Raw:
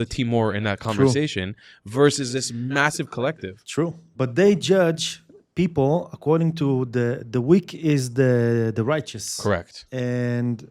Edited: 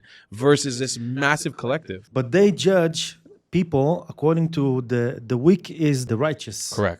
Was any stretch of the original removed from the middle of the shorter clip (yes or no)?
yes